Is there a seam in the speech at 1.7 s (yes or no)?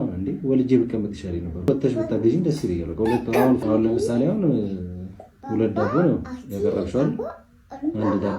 yes